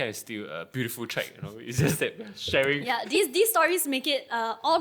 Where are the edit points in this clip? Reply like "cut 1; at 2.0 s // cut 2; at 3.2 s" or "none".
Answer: none

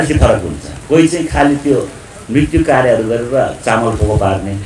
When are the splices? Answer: none

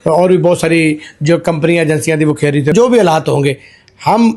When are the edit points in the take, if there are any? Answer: cut 1; at 2.7 s

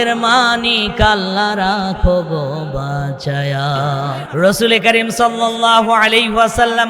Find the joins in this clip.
cut 1; at 4.2 s

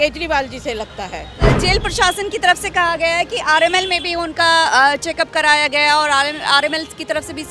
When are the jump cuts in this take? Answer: cut 1; at 1.4 s

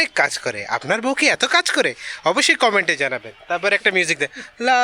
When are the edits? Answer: none

